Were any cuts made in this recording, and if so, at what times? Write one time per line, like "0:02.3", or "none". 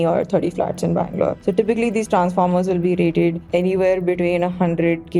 0:01.4
0:03.4